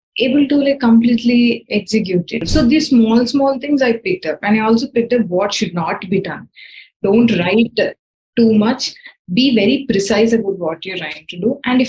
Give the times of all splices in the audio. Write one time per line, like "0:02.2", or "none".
0:02.4

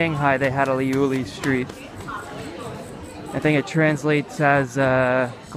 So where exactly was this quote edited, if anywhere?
0:02.0

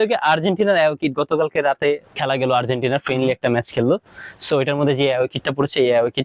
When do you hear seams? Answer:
0:02.1

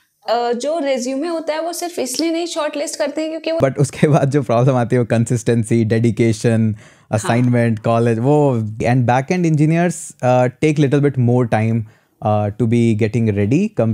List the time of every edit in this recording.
0:03.6
0:08.7

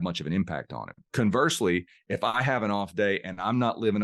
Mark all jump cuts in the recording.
0:01.0

